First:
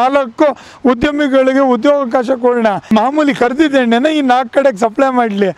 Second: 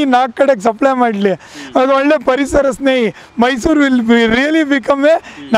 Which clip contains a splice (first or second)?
first